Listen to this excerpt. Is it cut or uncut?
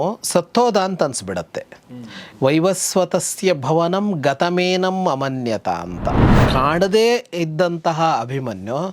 cut